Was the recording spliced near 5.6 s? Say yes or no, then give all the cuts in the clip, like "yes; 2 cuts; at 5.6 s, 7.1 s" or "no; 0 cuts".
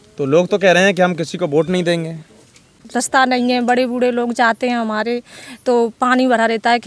no; 1 cut; at 2.8 s